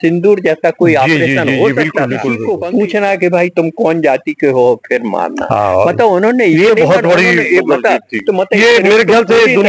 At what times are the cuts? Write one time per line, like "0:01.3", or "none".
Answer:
0:02.4